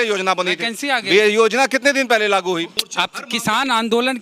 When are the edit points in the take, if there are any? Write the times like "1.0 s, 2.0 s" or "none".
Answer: 2.8 s